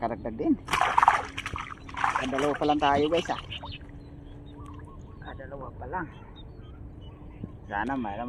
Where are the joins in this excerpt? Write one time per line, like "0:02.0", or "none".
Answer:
none